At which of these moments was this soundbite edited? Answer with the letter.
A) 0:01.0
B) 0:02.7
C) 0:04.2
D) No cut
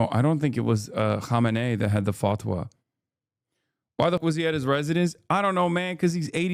C